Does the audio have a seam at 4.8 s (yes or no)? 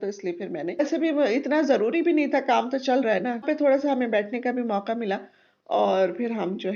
no